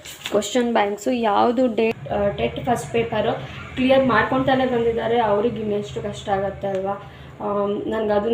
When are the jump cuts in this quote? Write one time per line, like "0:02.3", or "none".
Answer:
0:02.0